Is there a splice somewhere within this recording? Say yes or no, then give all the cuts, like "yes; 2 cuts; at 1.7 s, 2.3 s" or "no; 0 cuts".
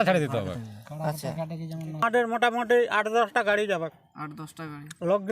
yes; 1 cut; at 2.0 s